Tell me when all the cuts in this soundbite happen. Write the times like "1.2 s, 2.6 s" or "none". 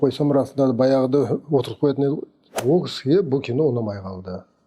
2.5 s